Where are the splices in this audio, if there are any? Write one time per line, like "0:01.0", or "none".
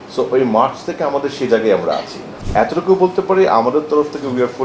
0:02.3